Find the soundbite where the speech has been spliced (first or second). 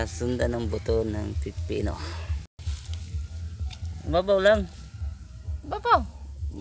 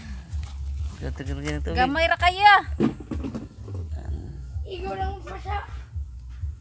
first